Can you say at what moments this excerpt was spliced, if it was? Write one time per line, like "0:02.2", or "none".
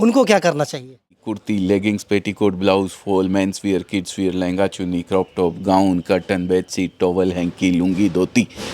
0:01.2